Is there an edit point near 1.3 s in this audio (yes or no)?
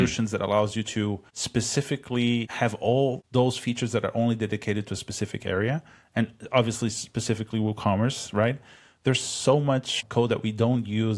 yes